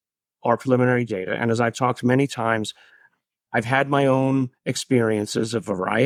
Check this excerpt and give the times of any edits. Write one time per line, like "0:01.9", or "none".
none